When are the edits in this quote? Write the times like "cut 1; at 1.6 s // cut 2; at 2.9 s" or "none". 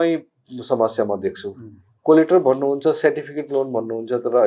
none